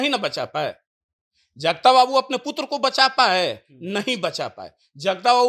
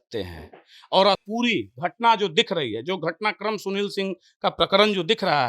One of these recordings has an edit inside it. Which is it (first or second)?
second